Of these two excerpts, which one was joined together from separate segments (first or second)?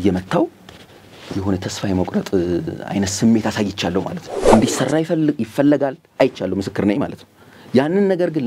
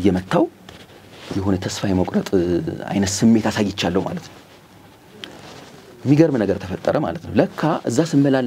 first